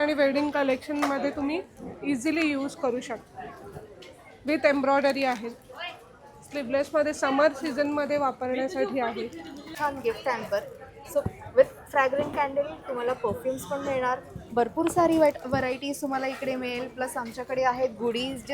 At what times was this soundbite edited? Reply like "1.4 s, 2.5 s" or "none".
9.7 s